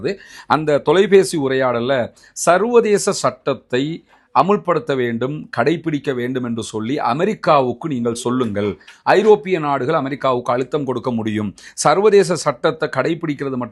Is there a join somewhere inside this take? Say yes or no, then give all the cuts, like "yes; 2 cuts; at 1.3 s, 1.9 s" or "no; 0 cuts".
no; 0 cuts